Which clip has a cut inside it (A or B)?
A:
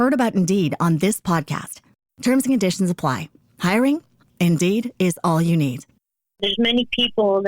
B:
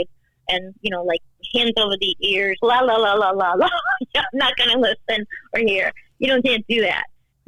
A